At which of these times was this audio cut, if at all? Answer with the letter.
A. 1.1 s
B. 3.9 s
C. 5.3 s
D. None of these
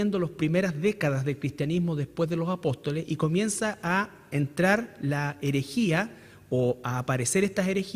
C